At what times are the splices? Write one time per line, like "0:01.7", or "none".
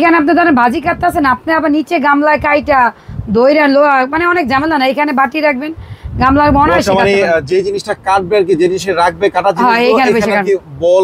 none